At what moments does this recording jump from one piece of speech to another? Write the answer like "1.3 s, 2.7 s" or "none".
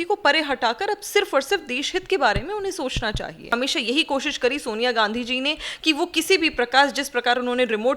3.5 s